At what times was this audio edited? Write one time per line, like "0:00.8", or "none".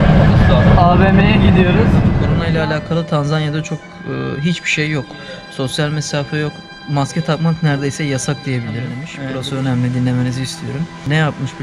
0:02.3
0:09.1